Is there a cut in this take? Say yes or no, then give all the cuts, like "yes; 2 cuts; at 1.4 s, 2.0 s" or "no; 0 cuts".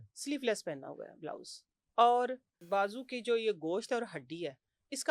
yes; 1 cut; at 2.6 s